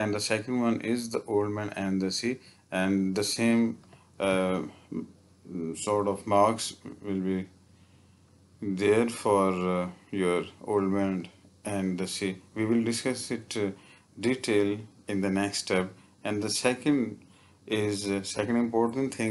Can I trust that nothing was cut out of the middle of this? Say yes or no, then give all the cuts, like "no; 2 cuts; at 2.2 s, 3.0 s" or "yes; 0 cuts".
yes; 0 cuts